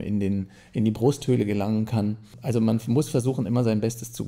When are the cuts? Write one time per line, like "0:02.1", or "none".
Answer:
0:02.4